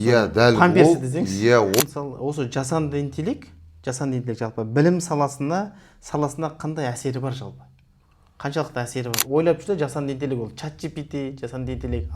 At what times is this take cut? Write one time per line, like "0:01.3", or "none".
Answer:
0:01.8
0:09.2